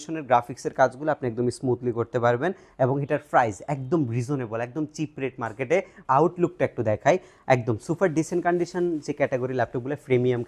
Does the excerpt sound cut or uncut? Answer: cut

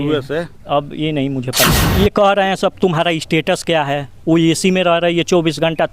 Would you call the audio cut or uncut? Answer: cut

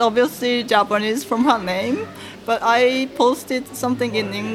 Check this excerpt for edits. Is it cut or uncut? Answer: uncut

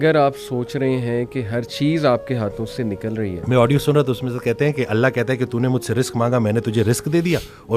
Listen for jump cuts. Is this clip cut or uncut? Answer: cut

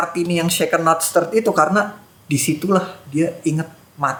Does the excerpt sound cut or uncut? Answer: uncut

